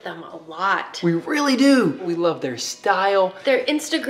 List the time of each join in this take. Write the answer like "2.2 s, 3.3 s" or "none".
2.1 s

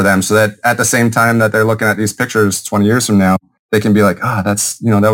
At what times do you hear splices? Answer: 3.5 s

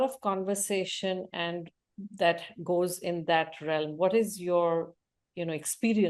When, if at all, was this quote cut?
none

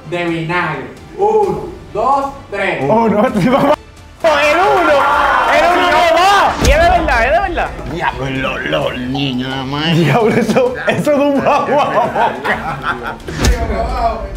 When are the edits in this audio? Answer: 6.6 s, 13.4 s

